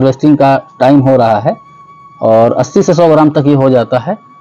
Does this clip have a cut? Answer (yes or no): no